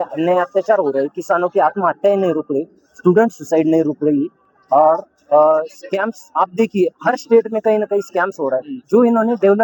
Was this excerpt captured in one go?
yes; 0 cuts

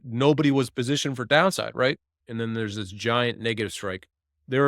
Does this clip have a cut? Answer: yes; 1 cut; at 2.3 s

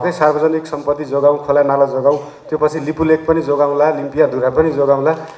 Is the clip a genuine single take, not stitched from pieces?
yes; 0 cuts

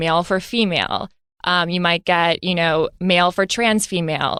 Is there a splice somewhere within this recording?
no; 0 cuts

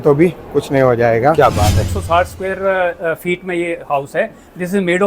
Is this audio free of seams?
no; 1 cut; at 1.9 s

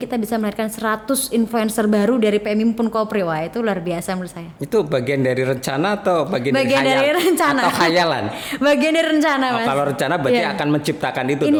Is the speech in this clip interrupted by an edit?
no; 0 cuts

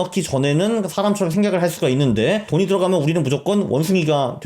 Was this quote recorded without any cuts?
no; 1 cut; at 2.5 s

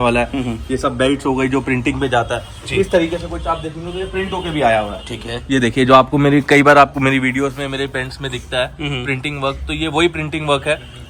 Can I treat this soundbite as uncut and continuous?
yes; 0 cuts

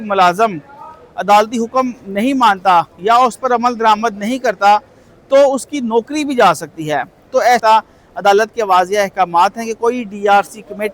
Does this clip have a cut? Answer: yes; 1 cut; at 7.6 s

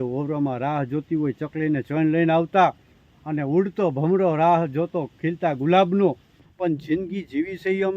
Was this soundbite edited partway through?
yes; 1 cut; at 6.4 s

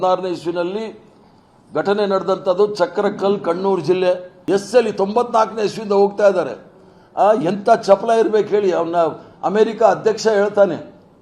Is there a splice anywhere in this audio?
yes; 1 cut; at 4.3 s

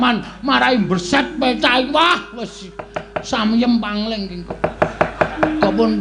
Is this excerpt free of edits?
yes; 0 cuts

